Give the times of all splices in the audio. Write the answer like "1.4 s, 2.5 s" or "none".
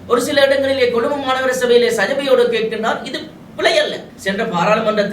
4.1 s